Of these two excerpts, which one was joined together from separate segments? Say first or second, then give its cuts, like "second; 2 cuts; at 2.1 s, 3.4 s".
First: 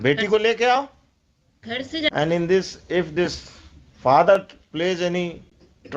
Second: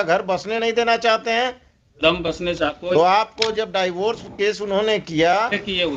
first; 1 cut; at 2.1 s